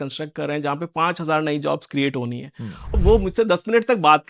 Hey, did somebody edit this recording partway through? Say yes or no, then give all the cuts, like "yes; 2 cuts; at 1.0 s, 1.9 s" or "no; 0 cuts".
yes; 1 cut; at 3.0 s